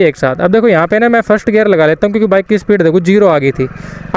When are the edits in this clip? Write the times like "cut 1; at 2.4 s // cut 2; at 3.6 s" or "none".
none